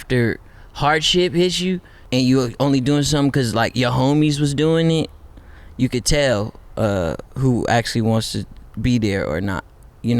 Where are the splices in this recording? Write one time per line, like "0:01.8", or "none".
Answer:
0:01.9